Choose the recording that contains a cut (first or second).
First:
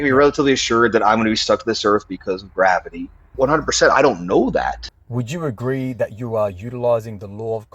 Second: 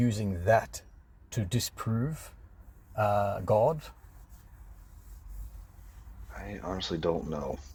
first